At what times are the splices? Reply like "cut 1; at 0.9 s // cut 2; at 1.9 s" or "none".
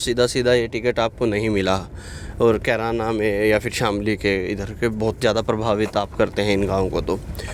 none